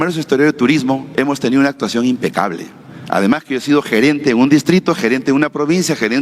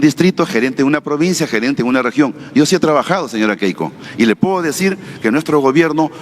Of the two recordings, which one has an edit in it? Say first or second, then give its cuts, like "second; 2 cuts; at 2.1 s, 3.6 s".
second; 1 cut; at 4.0 s